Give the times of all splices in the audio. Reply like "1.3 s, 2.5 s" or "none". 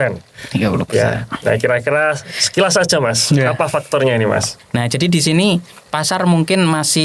4.6 s